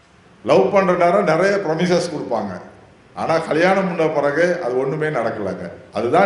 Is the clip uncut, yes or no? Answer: yes